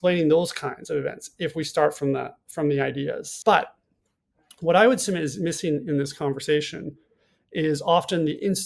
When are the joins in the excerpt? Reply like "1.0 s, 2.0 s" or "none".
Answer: 3.3 s

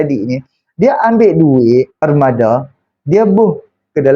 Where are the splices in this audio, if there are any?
1.9 s

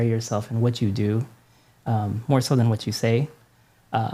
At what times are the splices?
none

